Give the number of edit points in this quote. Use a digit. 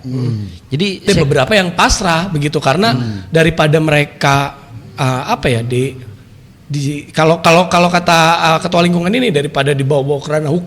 1